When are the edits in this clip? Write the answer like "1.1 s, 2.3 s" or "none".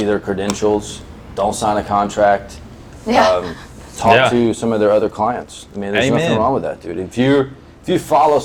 none